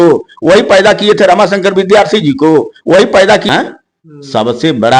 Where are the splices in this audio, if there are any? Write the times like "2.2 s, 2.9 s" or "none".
3.4 s